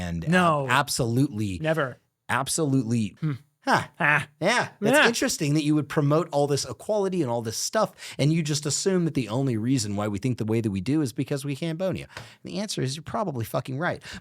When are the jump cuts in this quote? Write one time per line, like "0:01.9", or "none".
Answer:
0:03.2